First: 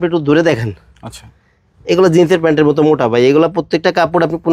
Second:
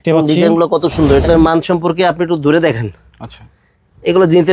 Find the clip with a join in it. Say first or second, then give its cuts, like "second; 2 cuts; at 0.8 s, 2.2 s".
second; 1 cut; at 1.2 s